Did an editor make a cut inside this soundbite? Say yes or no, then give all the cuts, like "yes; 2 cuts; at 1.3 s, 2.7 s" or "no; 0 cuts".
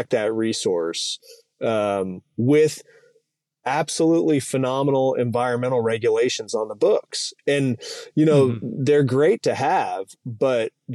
no; 0 cuts